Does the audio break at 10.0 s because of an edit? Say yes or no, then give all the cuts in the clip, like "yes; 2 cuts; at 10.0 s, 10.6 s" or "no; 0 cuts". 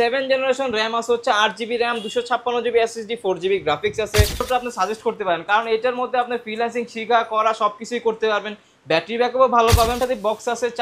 yes; 2 cuts; at 4.5 s, 10.0 s